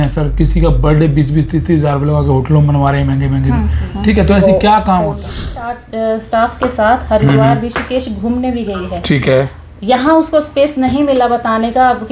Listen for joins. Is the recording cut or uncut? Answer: cut